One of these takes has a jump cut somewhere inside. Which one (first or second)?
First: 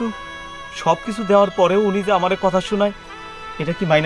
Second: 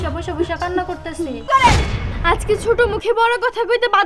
second